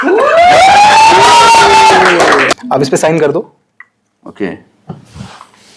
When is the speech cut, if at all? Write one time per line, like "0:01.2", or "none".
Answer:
0:02.5